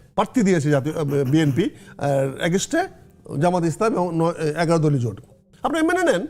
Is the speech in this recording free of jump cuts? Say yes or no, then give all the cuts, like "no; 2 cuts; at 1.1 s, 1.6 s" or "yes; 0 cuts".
yes; 0 cuts